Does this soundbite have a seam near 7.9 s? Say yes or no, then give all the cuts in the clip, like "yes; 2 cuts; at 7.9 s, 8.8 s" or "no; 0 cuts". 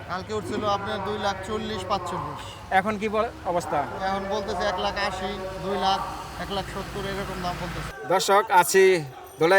yes; 1 cut; at 7.9 s